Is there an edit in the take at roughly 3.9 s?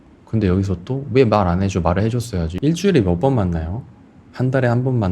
no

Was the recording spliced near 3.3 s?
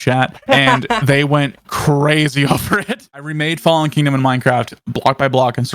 yes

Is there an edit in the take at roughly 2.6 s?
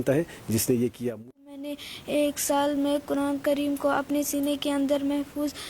no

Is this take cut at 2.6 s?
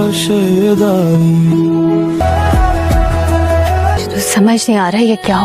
no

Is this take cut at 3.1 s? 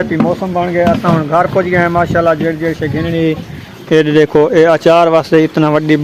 no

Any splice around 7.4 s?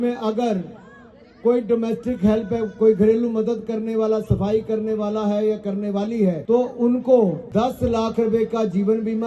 yes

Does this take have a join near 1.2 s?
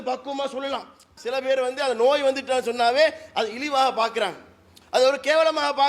yes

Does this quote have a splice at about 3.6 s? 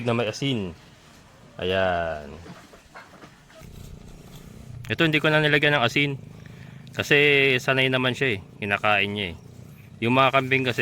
yes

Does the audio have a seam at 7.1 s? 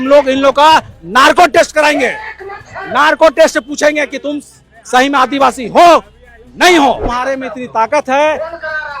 yes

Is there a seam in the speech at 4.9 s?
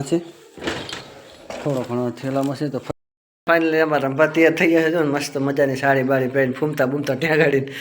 no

